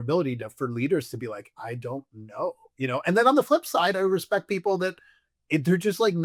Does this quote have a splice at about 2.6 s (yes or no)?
no